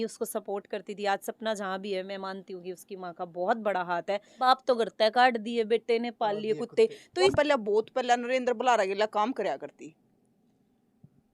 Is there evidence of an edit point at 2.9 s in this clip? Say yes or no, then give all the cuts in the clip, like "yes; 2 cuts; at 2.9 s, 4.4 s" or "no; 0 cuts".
no; 2 cuts; at 4.4 s, 7.3 s